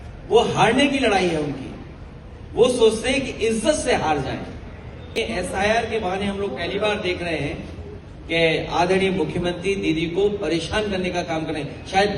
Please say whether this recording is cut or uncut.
cut